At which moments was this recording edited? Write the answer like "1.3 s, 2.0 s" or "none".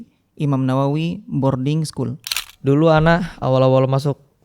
2.3 s